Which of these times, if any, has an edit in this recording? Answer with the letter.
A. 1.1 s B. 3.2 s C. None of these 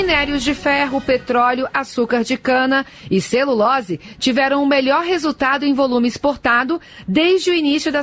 C